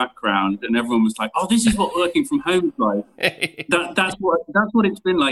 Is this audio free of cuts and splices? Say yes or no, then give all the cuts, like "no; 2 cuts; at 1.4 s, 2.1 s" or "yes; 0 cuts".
yes; 0 cuts